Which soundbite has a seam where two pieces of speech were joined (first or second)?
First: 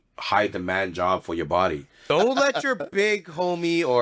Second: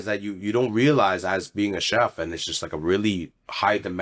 first